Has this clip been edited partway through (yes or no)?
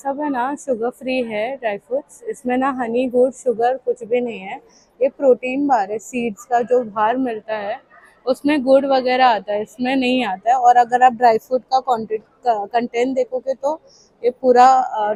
no